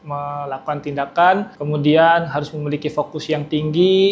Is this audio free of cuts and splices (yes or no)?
no